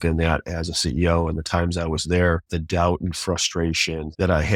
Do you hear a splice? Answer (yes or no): no